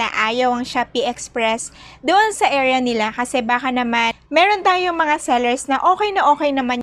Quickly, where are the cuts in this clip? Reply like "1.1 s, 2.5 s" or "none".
none